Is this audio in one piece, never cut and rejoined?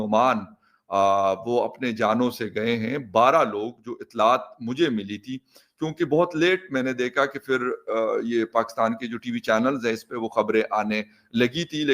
yes; 0 cuts

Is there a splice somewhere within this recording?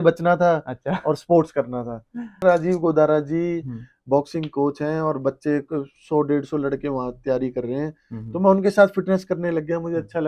yes; 1 cut; at 2.3 s

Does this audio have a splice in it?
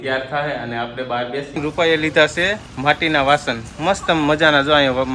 yes; 1 cut; at 1.5 s

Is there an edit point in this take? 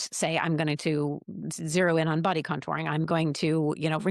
no; 0 cuts

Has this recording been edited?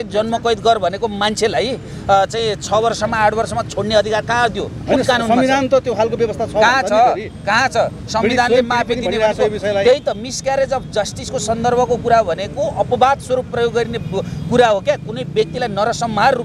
no; 0 cuts

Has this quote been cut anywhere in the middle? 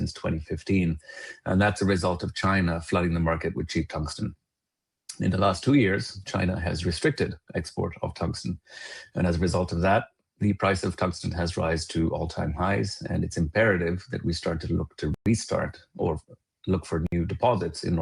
no; 0 cuts

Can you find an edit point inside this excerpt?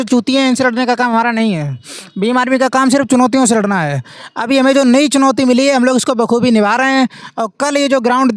no; 0 cuts

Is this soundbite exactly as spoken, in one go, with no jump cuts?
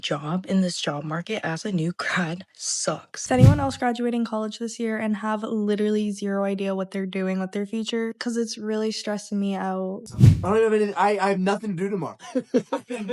no; 2 cuts; at 3.2 s, 10.0 s

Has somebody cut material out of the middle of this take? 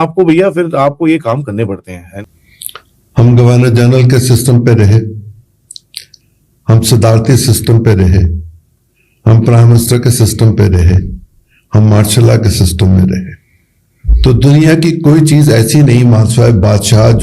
yes; 1 cut; at 2.1 s

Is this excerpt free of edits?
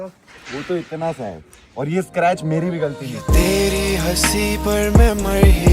no; 1 cut; at 3.2 s

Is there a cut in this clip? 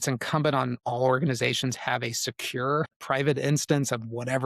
yes; 1 cut; at 3.0 s

